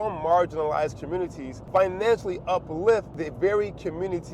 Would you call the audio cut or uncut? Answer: cut